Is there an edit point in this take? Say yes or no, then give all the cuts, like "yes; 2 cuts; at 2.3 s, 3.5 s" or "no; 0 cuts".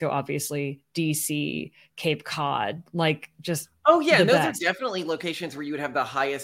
no; 0 cuts